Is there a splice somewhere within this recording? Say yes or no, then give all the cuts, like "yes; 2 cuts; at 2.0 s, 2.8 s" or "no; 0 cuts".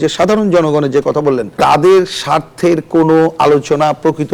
no; 0 cuts